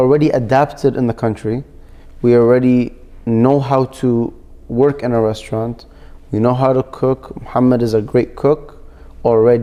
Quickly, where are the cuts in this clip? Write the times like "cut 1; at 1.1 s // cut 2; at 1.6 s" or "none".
none